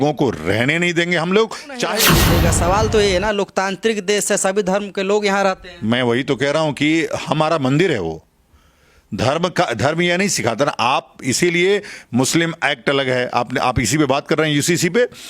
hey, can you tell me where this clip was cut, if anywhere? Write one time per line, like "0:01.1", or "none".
0:02.0